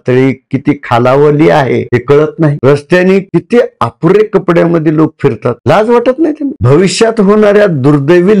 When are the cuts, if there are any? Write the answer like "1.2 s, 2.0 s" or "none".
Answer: 2.6 s